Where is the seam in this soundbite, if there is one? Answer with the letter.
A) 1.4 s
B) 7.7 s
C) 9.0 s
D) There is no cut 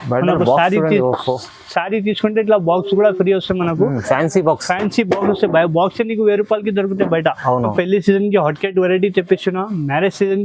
B